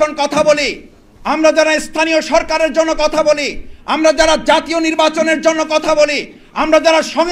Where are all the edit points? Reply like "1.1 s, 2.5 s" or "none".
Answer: none